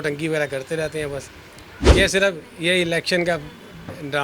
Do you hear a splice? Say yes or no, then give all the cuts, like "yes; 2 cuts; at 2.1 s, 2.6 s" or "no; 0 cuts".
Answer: yes; 1 cut; at 1.8 s